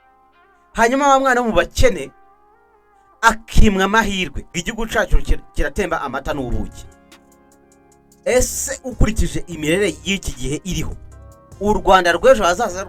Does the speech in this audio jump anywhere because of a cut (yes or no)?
yes